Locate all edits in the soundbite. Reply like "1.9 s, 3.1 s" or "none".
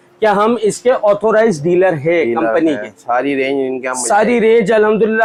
none